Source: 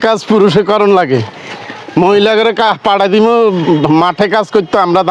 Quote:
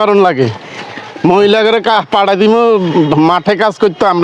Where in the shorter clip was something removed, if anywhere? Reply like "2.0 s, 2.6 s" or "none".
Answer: none